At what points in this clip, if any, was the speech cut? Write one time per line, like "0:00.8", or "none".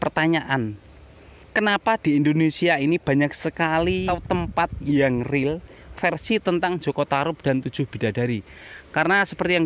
0:04.1